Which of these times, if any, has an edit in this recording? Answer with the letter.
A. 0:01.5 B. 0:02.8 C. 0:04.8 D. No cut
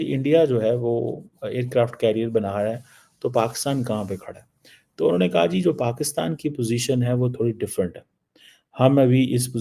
D